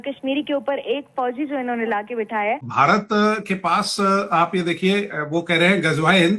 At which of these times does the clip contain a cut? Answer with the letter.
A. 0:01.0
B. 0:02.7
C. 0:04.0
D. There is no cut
B